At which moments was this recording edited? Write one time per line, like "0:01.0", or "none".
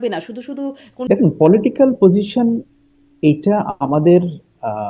0:01.1